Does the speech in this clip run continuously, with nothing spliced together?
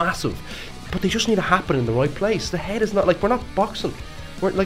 yes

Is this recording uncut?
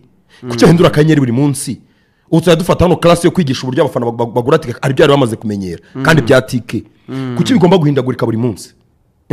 yes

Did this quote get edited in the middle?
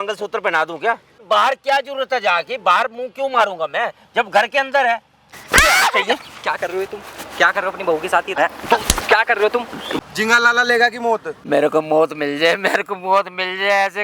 yes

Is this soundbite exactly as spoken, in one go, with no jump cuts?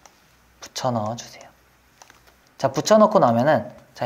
yes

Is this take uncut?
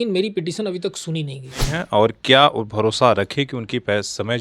no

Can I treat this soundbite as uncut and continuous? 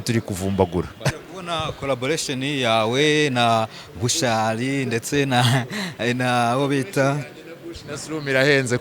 no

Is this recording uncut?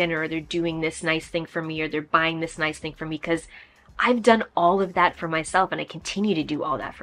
yes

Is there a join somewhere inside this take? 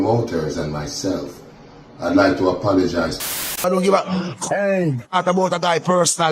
yes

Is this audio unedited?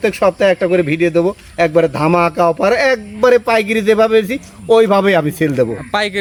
yes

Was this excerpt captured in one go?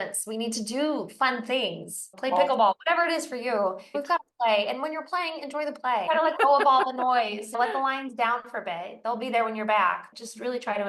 no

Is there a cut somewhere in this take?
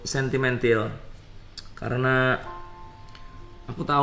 no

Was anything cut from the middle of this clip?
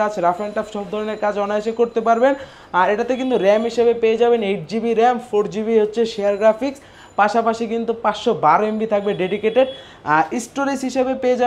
no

